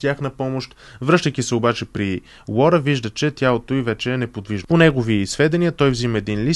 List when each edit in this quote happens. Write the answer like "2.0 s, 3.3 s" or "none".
4.5 s